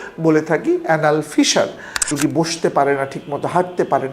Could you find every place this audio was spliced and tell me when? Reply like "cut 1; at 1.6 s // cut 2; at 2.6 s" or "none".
cut 1; at 2.1 s